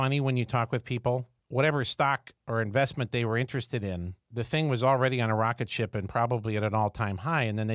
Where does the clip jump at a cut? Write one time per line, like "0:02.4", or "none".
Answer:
0:01.3
0:02.3
0:04.2